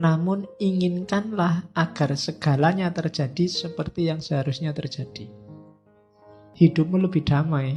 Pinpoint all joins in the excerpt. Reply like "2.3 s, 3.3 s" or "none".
6.5 s